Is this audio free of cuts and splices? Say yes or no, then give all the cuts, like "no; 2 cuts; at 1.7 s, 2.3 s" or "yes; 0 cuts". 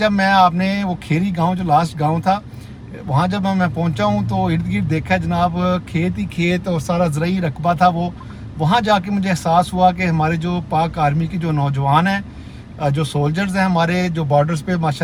yes; 0 cuts